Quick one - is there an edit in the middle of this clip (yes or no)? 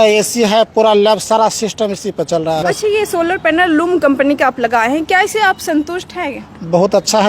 yes